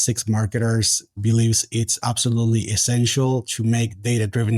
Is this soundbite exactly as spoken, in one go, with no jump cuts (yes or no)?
no